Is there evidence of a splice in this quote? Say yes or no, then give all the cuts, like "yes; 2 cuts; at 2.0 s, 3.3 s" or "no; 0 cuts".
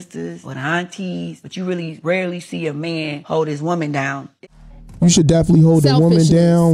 yes; 1 cut; at 4.4 s